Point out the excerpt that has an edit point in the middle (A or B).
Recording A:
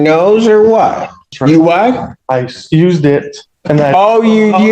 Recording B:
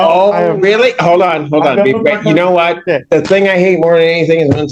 A